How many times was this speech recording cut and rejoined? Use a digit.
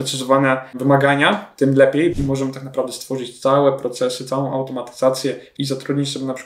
2